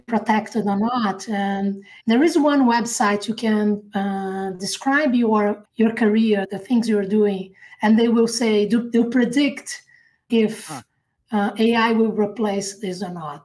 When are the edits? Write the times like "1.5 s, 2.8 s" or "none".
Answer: 1.9 s, 5.6 s, 6.5 s, 10.2 s